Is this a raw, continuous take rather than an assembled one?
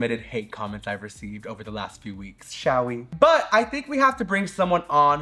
yes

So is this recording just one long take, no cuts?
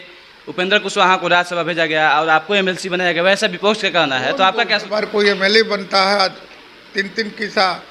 no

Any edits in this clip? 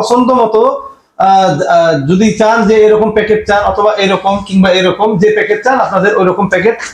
no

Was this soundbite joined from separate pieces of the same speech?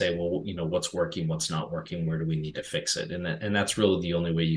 no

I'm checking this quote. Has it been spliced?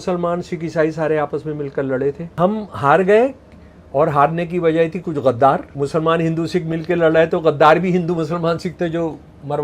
yes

